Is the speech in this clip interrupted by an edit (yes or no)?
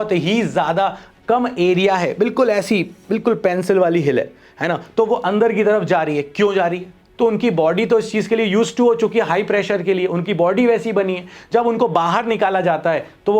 yes